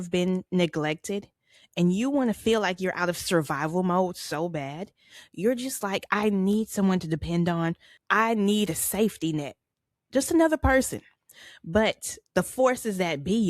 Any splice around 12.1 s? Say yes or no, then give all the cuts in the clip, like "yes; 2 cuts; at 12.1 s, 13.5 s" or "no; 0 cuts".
yes; 2 cuts; at 7.9 s, 12.1 s